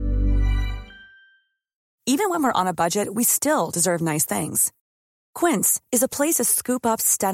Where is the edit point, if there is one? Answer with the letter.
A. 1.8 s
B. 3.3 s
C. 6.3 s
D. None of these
A